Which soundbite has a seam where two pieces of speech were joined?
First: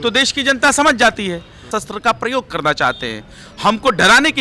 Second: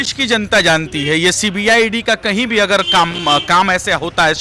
first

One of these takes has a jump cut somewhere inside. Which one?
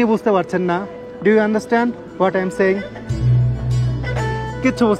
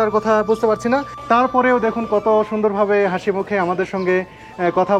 second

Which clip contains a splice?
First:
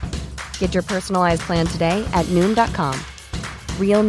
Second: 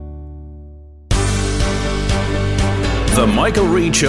second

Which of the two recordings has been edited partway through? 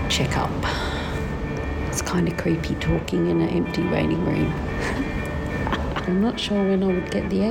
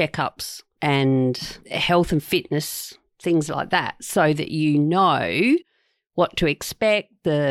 first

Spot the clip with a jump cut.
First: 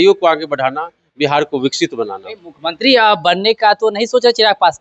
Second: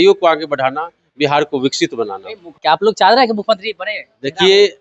second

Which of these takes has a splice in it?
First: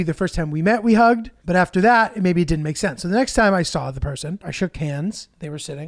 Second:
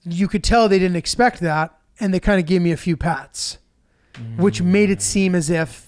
first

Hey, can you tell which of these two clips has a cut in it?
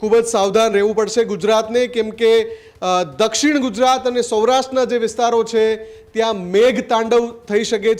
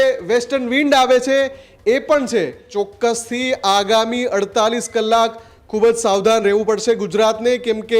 second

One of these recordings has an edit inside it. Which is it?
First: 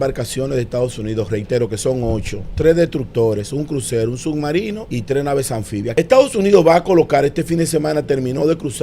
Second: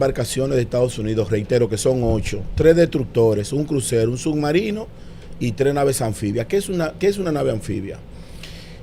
first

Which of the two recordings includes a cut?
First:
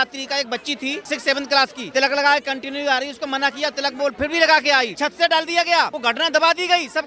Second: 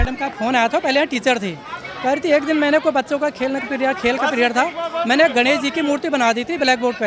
first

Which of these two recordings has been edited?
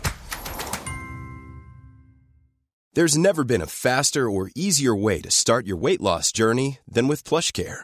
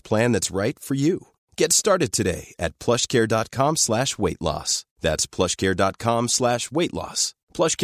first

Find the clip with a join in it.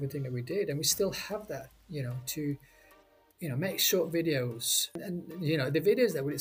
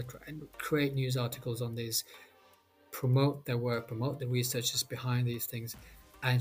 first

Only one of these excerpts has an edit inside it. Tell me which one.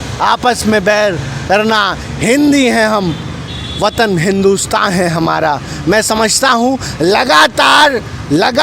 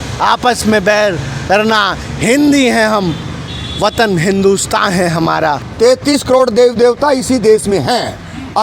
second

